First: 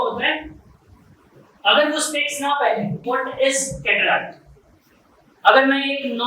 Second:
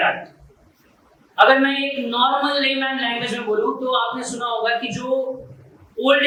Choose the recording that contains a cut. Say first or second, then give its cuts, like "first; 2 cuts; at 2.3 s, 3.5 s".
first; 1 cut; at 3.0 s